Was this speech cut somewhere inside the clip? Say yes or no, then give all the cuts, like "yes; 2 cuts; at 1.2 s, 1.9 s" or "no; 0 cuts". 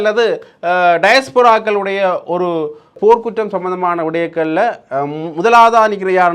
yes; 1 cut; at 3.0 s